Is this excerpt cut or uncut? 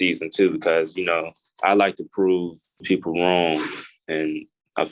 cut